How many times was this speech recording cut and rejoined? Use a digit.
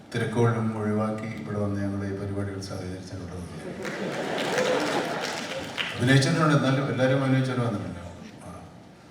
0